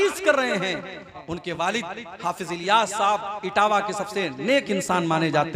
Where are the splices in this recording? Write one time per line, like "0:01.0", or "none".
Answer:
0:01.1